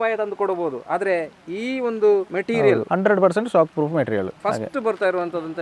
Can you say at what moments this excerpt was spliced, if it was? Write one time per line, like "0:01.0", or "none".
0:02.6
0:04.3